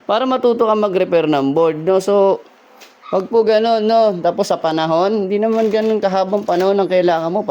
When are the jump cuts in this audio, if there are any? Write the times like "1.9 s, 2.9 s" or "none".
none